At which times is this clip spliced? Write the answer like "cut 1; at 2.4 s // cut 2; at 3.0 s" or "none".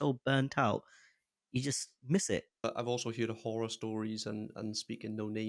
cut 1; at 2.6 s